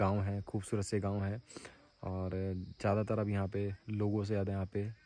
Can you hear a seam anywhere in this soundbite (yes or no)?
no